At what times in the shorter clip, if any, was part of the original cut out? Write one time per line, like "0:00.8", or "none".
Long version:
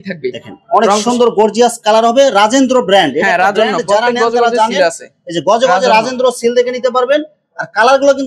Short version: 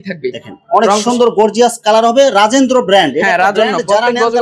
none